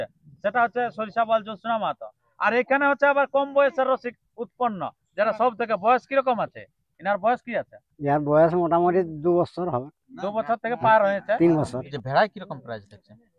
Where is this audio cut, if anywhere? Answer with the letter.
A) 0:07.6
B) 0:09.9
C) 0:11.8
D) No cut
C